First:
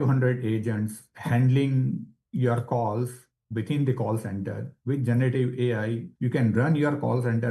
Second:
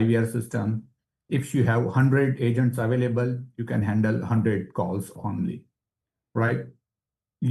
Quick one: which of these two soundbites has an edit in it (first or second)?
first